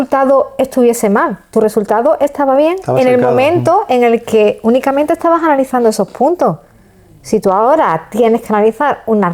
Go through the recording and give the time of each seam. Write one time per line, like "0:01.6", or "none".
none